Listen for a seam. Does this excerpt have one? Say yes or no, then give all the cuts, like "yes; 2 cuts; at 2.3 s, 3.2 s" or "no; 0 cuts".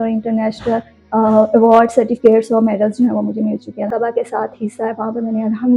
yes; 1 cut; at 3.9 s